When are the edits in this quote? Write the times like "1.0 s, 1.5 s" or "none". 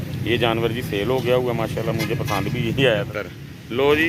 3.1 s